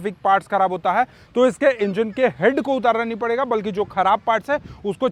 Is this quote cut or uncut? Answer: uncut